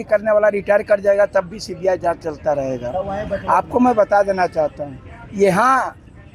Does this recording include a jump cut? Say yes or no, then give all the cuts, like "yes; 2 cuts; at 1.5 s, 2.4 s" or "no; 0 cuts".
no; 0 cuts